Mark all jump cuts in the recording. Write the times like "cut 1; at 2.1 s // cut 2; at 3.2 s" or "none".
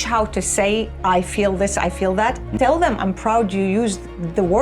cut 1; at 2.5 s